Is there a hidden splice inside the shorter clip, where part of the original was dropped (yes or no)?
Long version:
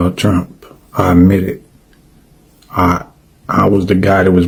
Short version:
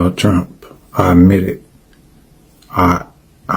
no